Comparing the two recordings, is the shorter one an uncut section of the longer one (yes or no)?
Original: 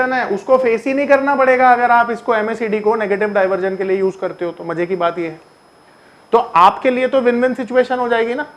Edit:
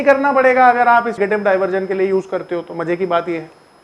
no